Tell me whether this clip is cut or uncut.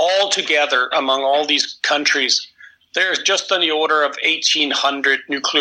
uncut